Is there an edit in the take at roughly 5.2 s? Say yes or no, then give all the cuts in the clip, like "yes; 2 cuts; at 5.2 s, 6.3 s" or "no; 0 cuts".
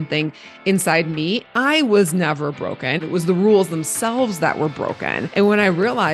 yes; 3 cuts; at 1.5 s, 3.0 s, 5.2 s